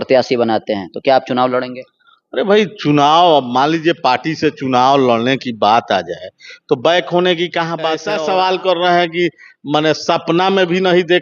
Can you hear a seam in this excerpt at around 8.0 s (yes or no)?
yes